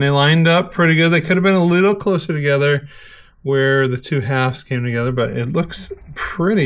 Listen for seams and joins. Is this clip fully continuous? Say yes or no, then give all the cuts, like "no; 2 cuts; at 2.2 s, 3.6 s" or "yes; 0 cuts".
yes; 0 cuts